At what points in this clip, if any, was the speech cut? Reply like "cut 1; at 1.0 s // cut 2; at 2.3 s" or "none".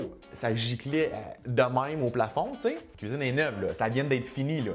cut 1; at 2.9 s